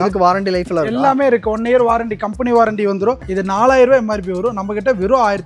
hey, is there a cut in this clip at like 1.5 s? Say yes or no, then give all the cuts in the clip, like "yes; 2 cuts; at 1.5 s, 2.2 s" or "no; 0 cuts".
no; 1 cut; at 3.2 s